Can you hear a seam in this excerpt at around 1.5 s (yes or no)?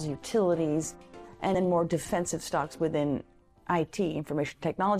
yes